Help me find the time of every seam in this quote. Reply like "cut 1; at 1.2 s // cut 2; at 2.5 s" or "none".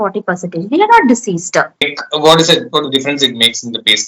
cut 1; at 2.0 s